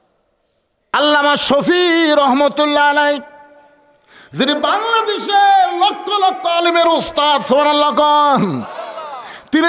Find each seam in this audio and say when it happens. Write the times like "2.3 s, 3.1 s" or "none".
0.9 s